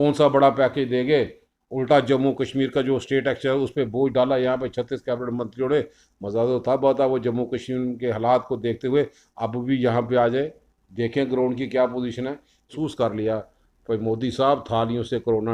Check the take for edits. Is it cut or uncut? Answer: cut